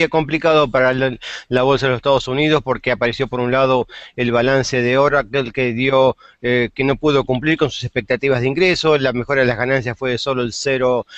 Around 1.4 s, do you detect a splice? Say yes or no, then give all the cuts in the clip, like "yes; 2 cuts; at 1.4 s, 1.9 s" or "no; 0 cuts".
yes; 1 cut; at 1.4 s